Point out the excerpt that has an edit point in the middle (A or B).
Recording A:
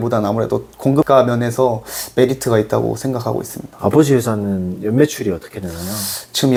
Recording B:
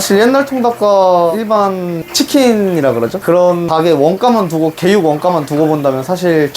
B